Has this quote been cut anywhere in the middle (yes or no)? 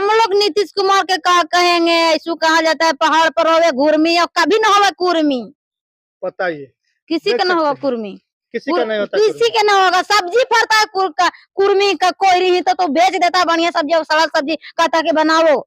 no